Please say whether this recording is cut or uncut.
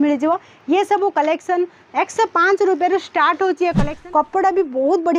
cut